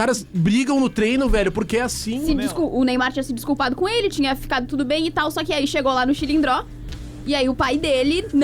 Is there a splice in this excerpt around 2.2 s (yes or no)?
yes